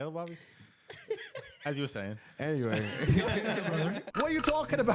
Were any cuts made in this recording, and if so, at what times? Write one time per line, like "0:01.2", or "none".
0:04.0

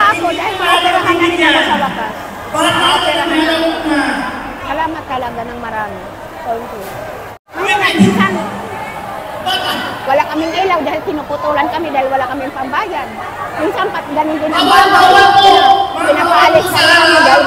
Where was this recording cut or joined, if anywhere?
0:07.5

